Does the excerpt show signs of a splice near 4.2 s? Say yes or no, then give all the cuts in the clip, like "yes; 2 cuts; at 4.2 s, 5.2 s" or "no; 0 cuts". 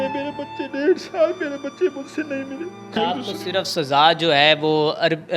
no; 1 cut; at 3.0 s